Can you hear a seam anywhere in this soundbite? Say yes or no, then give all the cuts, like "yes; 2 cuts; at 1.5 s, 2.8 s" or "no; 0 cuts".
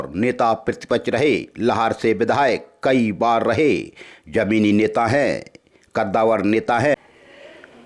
yes; 1 cut; at 7.0 s